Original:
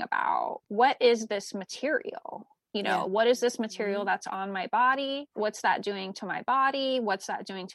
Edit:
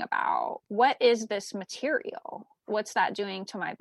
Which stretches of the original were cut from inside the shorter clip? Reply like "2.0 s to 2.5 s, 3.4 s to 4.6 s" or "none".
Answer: 2.6 s to 5.3 s

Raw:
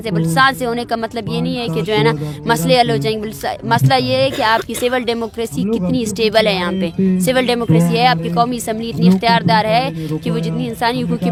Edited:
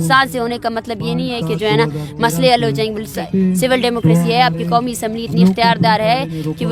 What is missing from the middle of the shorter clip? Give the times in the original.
3.5 s to 6.8 s

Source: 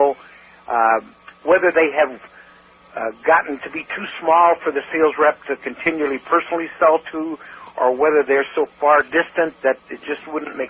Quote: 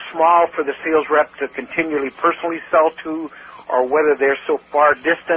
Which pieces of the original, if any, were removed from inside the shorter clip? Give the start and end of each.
none

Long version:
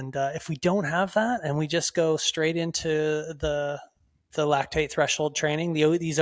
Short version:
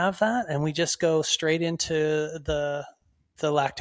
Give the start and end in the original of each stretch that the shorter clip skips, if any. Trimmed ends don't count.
none

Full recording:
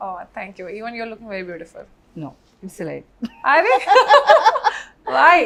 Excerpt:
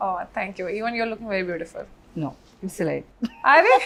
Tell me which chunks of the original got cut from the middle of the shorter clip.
none

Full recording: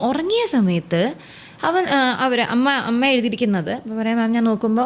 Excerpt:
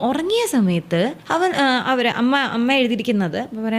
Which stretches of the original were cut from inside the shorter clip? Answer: 1.2 s to 1.5 s

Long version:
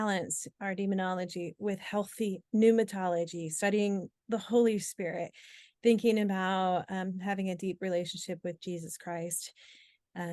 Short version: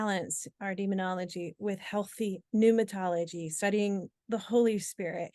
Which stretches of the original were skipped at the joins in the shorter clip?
none

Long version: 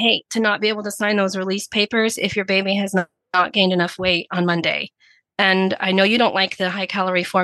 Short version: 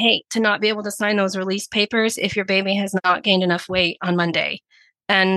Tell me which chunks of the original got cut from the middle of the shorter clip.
3.0 s to 3.3 s

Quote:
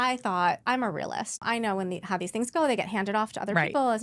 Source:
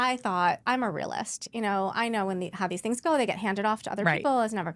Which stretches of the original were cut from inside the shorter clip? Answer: 1.4 s to 1.9 s

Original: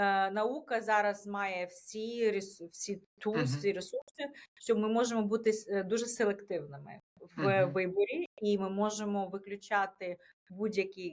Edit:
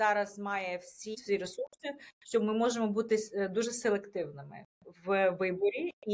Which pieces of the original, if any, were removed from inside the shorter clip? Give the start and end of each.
2.1 s to 3.5 s

